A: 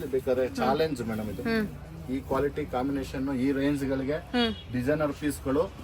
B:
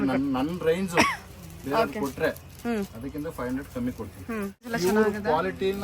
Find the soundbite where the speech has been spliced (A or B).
B